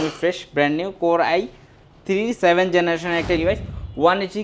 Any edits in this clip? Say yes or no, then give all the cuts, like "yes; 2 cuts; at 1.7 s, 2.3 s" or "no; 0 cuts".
yes; 1 cut; at 3.4 s